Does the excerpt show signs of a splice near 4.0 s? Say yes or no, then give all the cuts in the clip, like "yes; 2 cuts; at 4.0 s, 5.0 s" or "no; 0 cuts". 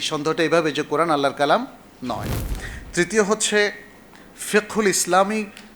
no; 0 cuts